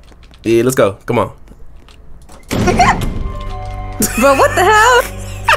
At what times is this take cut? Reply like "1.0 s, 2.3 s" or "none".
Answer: none